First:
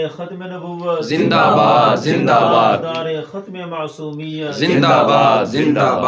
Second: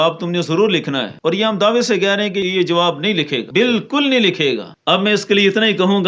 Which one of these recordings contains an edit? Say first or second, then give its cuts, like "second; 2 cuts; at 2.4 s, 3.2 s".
second; 4 cuts; at 1.1 s, 2.5 s, 3.4 s, 4.7 s